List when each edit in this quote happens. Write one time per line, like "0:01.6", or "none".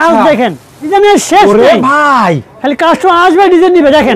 0:00.9